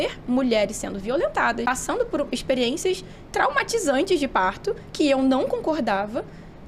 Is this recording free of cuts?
no; 1 cut; at 1.7 s

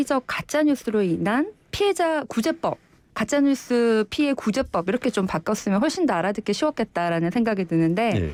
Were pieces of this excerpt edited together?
no; 0 cuts

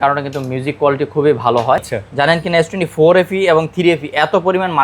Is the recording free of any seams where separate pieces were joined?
no; 1 cut; at 1.9 s

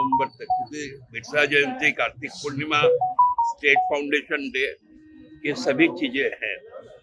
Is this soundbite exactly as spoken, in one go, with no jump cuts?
yes; 0 cuts

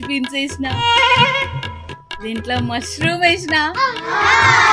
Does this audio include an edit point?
no; 0 cuts

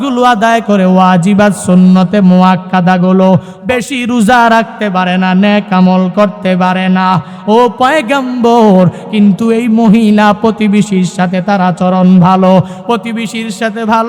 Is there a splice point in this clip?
yes; 1 cut; at 3.5 s

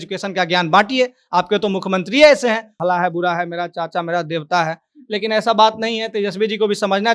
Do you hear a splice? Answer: yes; 1 cut; at 2.7 s

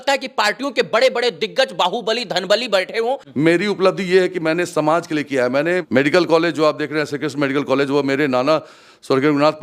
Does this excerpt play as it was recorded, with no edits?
no; 2 cuts; at 3.2 s, 5.9 s

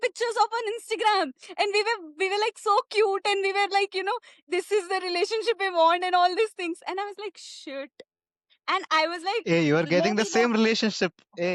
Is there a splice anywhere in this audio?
no; 0 cuts

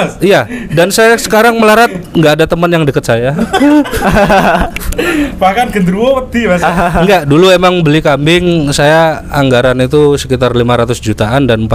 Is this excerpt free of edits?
yes; 0 cuts

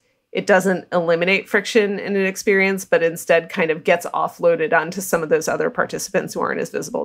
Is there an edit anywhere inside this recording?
no; 0 cuts

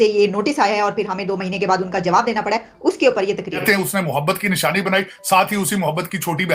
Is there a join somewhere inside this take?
yes; 1 cut; at 3.6 s

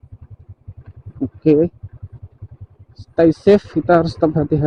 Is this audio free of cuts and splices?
yes; 0 cuts

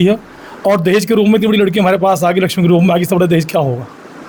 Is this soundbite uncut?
yes; 0 cuts

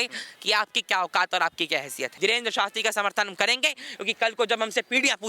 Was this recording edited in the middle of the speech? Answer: yes; 1 cut; at 2.1 s

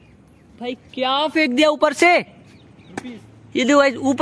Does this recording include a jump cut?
no; 0 cuts

